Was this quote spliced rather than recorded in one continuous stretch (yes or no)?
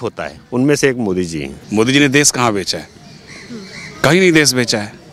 yes